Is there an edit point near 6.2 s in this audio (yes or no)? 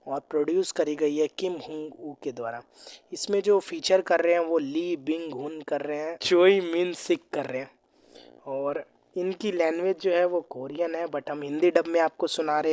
yes